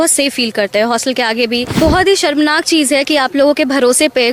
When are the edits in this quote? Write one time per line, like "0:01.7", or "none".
0:01.7